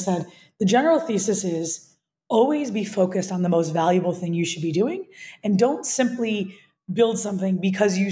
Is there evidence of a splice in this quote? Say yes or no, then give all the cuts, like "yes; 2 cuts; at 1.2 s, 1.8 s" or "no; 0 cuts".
no; 0 cuts